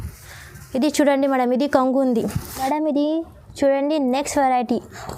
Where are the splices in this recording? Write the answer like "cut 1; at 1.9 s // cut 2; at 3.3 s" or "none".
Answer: cut 1; at 2.5 s